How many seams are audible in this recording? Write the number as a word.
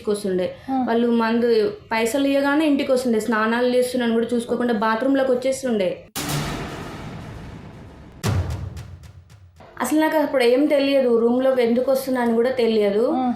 one